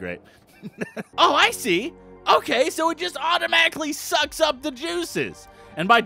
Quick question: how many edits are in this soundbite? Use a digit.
1